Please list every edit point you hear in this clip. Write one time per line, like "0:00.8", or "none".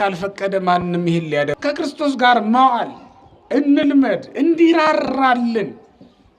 0:01.5